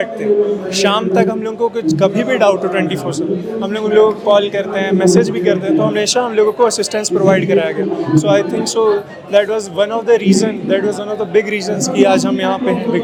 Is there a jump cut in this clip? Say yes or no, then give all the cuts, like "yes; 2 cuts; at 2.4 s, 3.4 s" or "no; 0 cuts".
no; 0 cuts